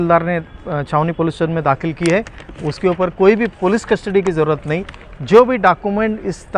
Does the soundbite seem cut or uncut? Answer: uncut